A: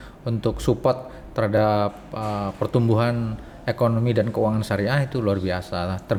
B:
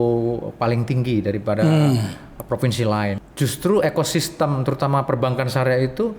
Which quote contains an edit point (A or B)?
B